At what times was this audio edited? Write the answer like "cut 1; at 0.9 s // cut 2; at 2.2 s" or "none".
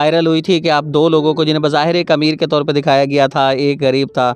none